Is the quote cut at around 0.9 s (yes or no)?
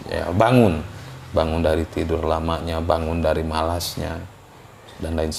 no